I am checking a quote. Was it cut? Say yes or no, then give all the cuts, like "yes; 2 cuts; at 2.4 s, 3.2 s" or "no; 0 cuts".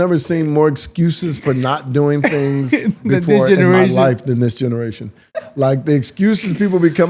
no; 0 cuts